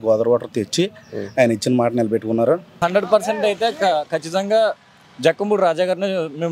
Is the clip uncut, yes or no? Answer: no